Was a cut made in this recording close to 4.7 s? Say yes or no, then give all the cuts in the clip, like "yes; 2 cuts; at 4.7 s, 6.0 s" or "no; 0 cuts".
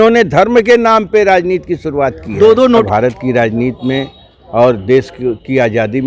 no; 1 cut; at 2.8 s